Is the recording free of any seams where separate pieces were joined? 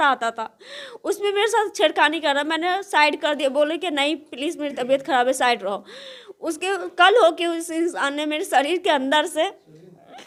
yes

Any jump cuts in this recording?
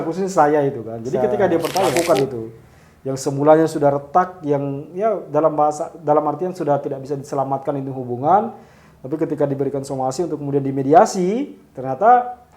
yes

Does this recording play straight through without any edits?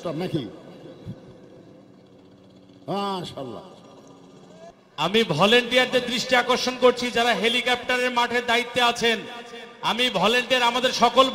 no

